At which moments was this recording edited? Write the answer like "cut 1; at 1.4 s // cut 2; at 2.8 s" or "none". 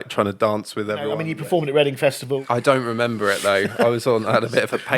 cut 1; at 1.2 s // cut 2; at 2.4 s